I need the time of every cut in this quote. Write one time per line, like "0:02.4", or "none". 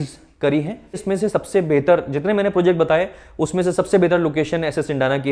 0:01.0